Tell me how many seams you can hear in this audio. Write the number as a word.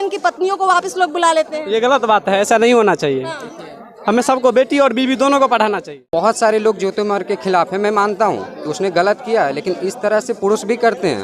one